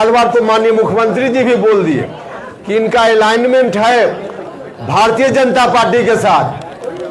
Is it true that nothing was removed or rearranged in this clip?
yes; 0 cuts

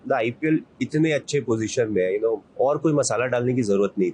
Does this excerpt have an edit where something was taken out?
yes; 1 cut; at 2.5 s

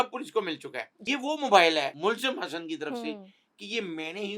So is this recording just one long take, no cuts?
no; 2 cuts; at 0.9 s, 1.9 s

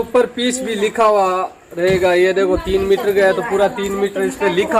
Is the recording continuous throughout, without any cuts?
yes; 0 cuts

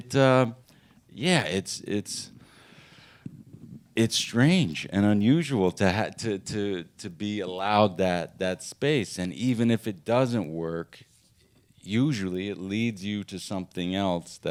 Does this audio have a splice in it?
no; 0 cuts

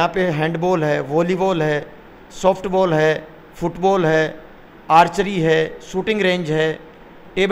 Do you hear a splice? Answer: no; 0 cuts

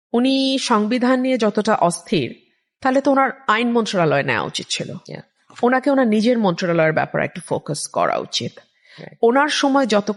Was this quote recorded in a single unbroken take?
yes; 0 cuts

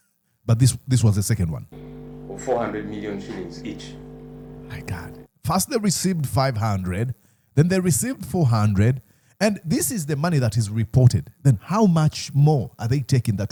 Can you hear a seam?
no; 0 cuts

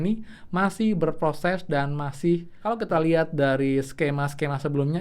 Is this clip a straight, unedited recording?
no; 1 cut; at 2.6 s

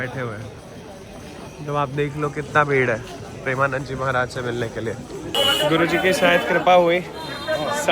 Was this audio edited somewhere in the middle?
yes; 1 cut; at 5.3 s

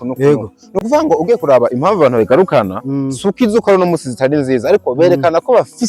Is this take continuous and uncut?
yes; 0 cuts

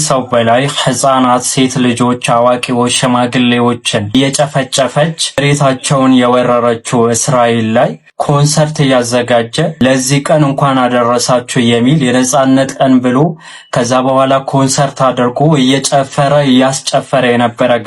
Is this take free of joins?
yes; 0 cuts

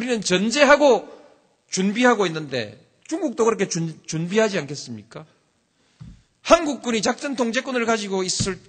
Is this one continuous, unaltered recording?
yes; 0 cuts

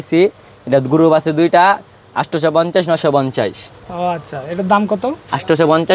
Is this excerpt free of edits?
yes; 0 cuts

